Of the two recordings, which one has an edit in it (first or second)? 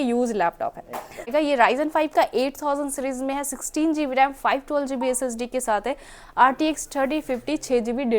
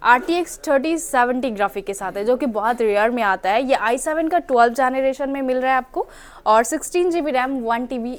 first